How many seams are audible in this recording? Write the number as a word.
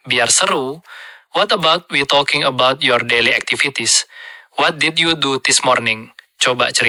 zero